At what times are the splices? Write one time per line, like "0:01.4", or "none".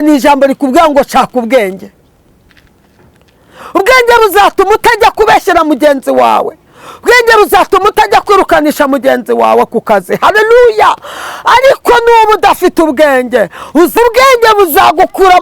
0:14.0